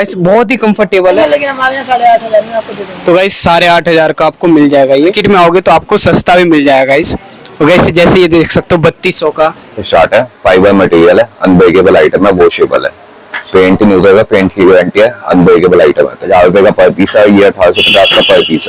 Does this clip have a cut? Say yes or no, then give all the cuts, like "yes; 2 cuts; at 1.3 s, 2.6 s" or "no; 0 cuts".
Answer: yes; 4 cuts; at 1.2 s, 5.2 s, 9.8 s, 16.3 s